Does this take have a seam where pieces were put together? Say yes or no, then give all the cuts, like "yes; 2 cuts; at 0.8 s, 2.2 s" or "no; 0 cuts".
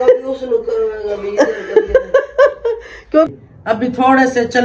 yes; 1 cut; at 3.3 s